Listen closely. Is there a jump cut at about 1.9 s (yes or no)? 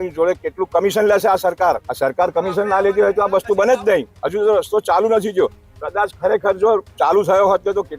yes